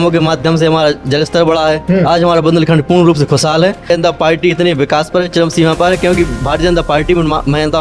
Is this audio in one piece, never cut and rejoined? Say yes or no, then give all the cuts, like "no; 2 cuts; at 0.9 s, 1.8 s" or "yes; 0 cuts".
no; 1 cut; at 3.9 s